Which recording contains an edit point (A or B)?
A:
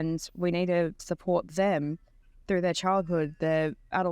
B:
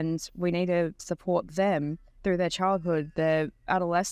B